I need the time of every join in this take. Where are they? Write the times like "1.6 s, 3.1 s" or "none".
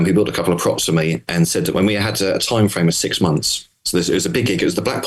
none